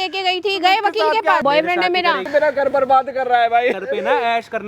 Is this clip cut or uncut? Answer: cut